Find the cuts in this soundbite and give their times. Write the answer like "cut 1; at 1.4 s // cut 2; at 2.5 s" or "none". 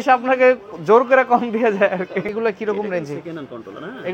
cut 1; at 2.3 s